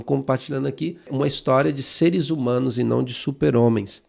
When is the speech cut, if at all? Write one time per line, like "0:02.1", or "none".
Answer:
0:01.1